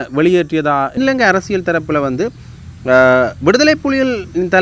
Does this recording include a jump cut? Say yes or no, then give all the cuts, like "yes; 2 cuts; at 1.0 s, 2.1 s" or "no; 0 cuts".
yes; 1 cut; at 1.0 s